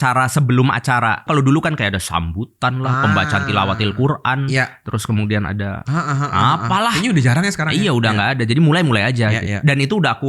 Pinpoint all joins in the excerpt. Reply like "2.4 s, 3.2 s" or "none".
1.2 s